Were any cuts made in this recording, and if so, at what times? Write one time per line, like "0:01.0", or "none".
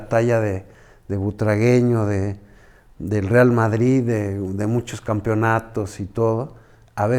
none